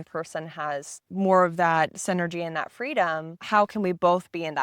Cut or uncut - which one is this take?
cut